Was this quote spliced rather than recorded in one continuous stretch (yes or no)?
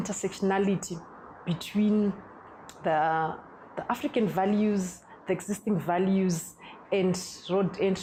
no